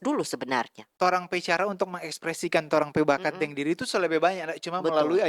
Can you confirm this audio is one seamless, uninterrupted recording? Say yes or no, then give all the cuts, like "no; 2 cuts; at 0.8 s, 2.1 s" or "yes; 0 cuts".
no; 1 cut; at 1.0 s